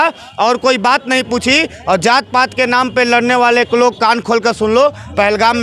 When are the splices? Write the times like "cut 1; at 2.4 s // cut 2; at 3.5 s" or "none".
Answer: none